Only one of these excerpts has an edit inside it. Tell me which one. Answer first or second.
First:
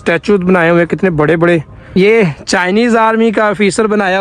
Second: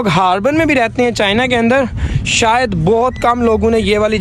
first